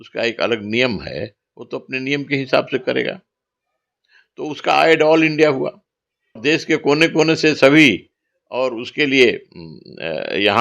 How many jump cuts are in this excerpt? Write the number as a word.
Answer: one